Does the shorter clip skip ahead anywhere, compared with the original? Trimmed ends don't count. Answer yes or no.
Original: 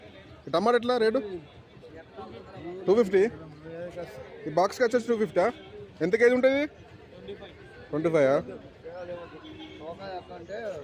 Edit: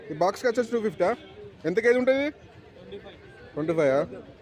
no